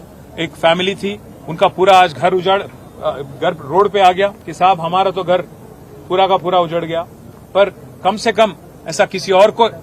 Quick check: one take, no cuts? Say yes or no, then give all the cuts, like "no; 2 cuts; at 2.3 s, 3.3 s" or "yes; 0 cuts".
no; 1 cut; at 4.4 s